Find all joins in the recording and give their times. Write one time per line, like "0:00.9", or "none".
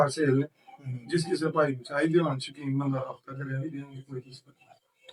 none

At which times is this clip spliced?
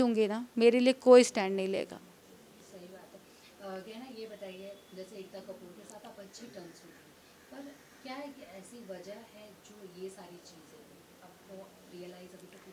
none

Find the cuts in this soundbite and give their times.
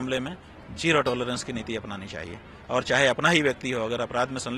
none

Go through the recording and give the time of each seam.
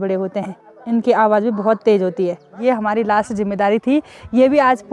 0:02.5

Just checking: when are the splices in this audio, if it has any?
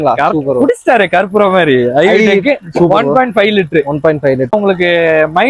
0:04.5

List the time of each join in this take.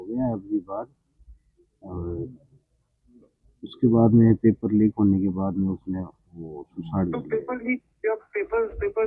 none

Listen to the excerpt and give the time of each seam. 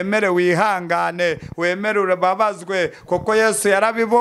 none

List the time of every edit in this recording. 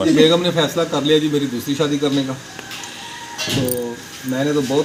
none

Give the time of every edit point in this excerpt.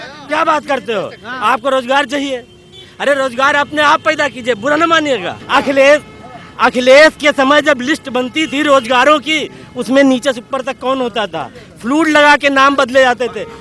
0:05.4

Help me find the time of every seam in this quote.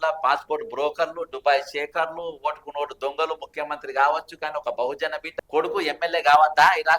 0:05.3

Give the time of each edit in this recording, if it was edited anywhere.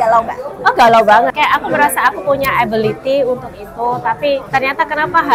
0:01.3
0:04.5

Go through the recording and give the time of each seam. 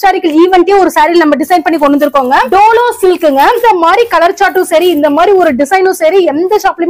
0:02.5
0:03.6

